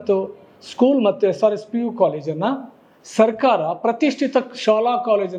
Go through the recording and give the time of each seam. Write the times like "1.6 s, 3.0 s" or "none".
none